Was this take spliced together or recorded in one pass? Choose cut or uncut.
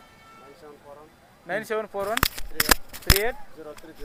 uncut